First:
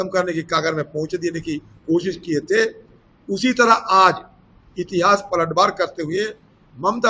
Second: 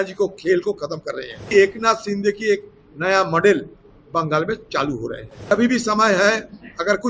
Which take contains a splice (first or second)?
second